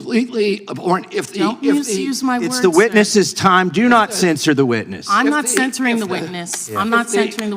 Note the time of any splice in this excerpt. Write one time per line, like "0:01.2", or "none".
0:05.0

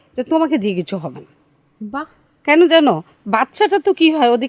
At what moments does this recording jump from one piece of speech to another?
none

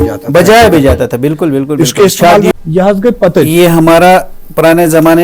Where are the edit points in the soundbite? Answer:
0:02.5

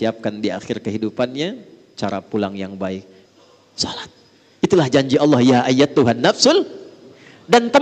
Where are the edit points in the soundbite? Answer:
0:03.2

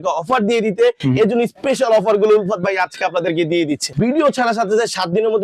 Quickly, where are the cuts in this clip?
0:03.9

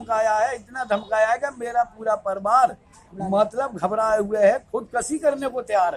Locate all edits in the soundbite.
none

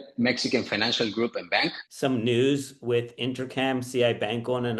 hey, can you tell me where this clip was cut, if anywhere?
0:01.8

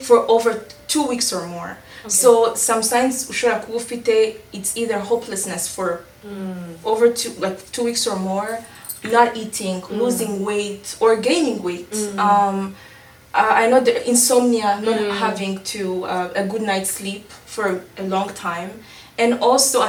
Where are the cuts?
none

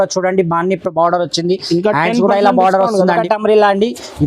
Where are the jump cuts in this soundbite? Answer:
0:03.1

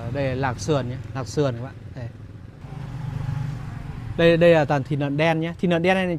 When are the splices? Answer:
0:02.6

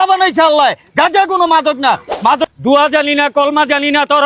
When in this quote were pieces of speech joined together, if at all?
0:02.4

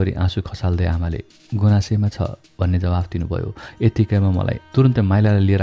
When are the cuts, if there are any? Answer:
0:04.6

